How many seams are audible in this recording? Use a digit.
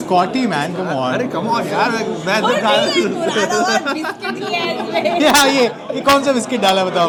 0